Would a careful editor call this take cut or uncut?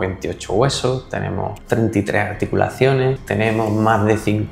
cut